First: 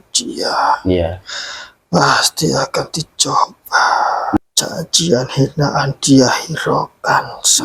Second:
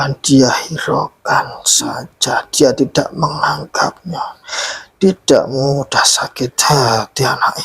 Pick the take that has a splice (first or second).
first